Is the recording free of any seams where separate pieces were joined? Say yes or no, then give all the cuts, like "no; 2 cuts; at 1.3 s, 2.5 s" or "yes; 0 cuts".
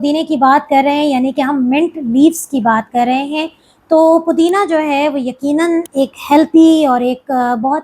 no; 1 cut; at 5.9 s